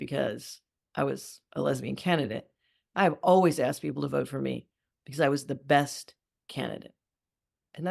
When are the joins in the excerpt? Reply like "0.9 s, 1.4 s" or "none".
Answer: none